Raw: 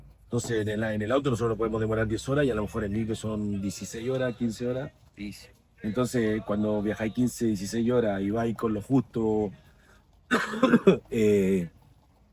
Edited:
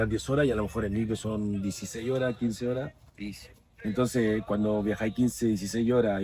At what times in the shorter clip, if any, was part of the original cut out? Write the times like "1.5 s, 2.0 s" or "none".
none